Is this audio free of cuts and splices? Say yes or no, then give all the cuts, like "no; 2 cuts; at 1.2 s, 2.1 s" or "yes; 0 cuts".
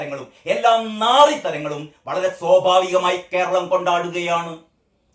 yes; 0 cuts